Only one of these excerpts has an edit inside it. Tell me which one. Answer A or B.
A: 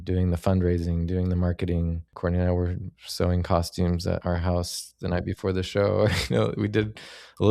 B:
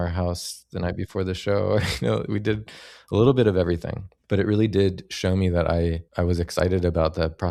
A